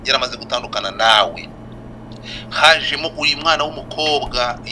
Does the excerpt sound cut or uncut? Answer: uncut